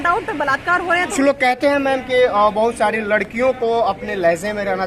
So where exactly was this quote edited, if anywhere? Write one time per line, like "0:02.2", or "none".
0:01.1